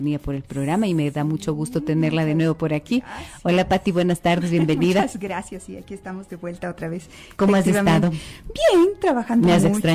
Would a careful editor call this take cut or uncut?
uncut